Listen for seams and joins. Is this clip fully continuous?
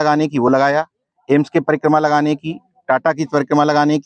yes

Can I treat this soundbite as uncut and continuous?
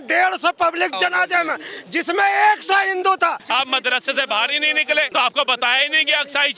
no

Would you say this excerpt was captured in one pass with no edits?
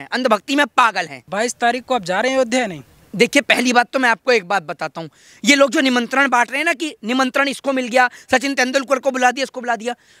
yes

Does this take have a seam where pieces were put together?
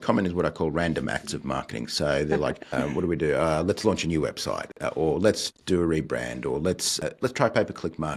yes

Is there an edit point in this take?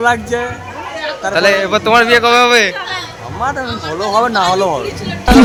no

